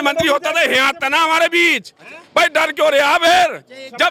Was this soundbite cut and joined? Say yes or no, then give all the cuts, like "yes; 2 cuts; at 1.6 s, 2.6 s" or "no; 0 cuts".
no; 0 cuts